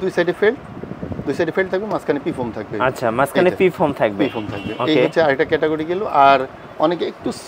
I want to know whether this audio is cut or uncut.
uncut